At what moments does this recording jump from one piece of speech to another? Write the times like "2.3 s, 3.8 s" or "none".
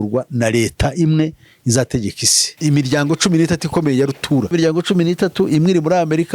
2.5 s, 4.5 s